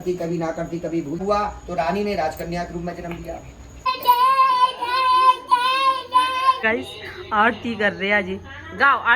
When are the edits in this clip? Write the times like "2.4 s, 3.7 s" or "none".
1.2 s, 3.7 s, 6.6 s